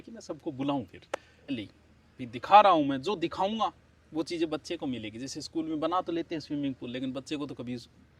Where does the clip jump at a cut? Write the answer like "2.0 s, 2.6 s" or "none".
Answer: 1.5 s